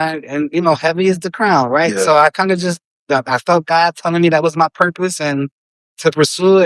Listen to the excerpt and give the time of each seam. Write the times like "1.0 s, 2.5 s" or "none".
none

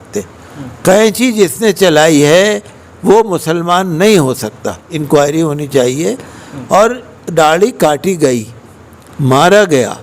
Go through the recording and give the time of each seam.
4.9 s

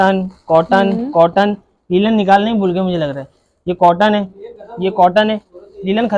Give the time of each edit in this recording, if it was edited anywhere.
none

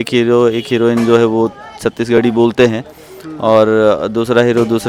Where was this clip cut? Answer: none

